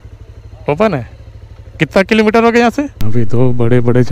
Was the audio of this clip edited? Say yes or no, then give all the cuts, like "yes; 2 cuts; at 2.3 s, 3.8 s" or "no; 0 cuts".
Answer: yes; 1 cut; at 3.0 s